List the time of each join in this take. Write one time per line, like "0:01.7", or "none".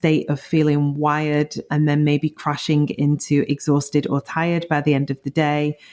none